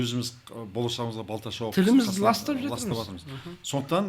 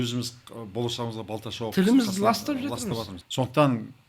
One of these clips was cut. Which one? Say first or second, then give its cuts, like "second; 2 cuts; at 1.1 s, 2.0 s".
second; 1 cut; at 3.2 s